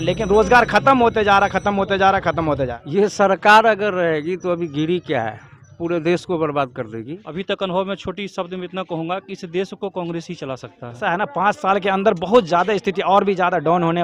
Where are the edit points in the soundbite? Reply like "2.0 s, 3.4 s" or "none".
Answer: 2.8 s, 7.2 s, 11.0 s